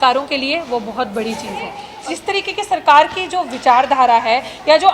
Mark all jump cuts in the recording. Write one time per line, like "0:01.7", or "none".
0:01.9